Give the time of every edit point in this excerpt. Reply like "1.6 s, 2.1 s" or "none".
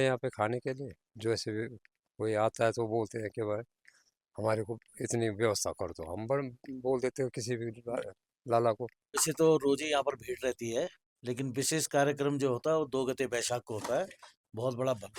9.2 s